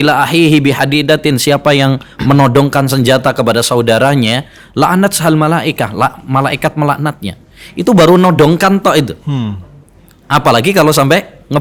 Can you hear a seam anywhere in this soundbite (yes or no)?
no